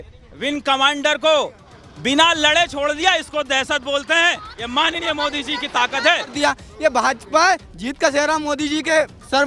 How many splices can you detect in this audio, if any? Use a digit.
1